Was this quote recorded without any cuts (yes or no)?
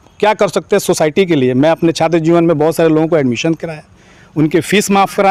yes